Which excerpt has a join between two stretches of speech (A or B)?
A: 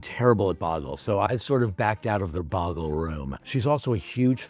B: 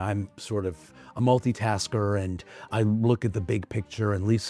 A